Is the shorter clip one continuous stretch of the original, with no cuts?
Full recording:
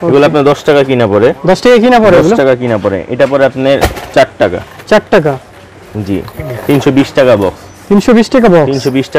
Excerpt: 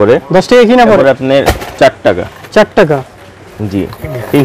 no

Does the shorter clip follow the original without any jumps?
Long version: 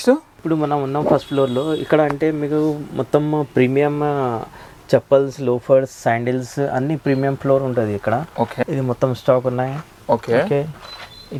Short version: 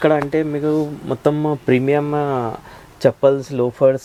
yes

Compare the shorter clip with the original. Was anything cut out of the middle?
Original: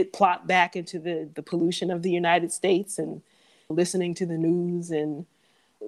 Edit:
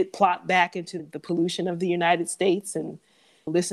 yes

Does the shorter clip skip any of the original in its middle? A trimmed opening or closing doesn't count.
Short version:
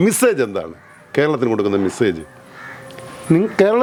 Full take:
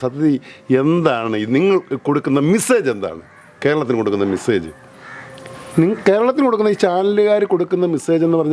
no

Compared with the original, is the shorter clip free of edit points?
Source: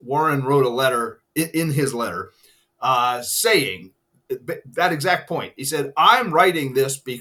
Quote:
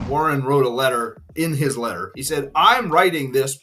no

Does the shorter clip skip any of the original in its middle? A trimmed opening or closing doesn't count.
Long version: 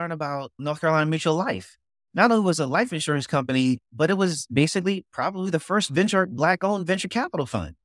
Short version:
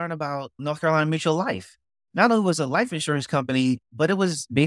no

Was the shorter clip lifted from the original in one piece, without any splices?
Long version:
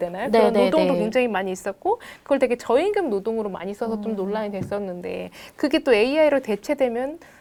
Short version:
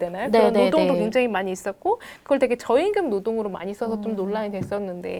yes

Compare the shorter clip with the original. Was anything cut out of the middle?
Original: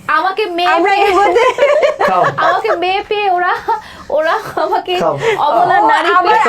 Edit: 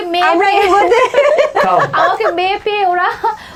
no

